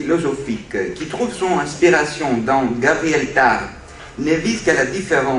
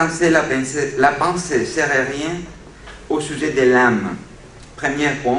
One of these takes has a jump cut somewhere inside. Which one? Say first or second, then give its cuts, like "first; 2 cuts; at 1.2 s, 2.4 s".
first; 1 cut; at 3.1 s